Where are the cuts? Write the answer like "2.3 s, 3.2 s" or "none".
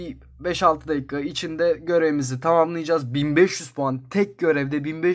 none